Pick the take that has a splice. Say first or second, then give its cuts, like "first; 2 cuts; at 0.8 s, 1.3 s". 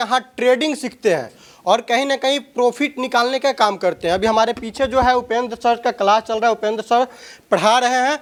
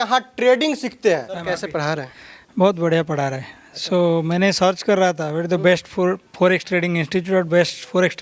second; 1 cut; at 1.3 s